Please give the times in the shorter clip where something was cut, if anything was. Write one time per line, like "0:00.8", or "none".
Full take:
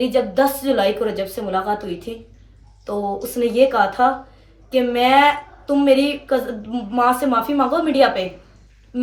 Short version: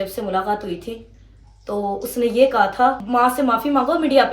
0:03.0